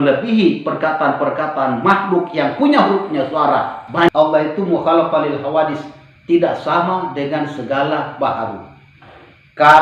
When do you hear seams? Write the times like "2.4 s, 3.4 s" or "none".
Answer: 4.1 s